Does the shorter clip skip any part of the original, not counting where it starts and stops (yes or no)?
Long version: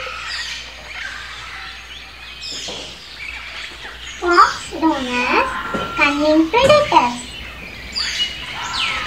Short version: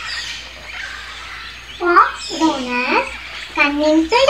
yes